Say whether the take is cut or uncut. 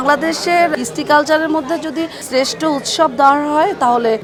uncut